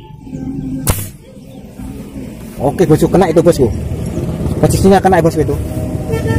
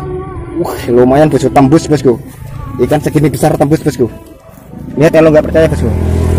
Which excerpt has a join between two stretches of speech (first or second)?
first